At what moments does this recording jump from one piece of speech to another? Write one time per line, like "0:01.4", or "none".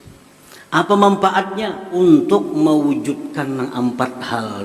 0:02.0